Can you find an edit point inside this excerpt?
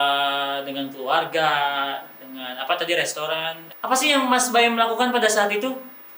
yes; 1 cut; at 3.6 s

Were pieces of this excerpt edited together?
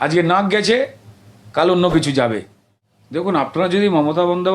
yes; 1 cut; at 3.2 s

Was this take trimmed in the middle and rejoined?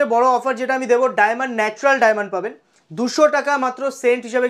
no; 0 cuts

